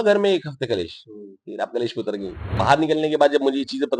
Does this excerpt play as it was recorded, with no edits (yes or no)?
no